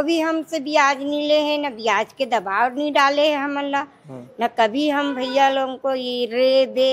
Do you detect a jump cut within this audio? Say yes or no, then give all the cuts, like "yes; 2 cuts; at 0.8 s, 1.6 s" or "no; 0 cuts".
no; 0 cuts